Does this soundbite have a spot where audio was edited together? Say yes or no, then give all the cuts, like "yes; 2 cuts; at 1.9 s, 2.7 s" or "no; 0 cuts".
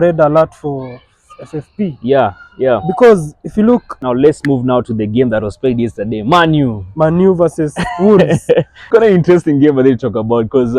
yes; 2 cuts; at 3.9 s, 8.9 s